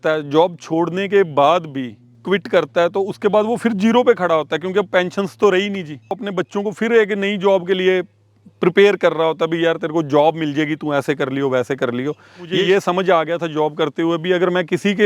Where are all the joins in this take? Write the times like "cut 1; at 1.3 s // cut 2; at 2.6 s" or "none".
cut 1; at 2.1 s // cut 2; at 6.1 s // cut 3; at 12.4 s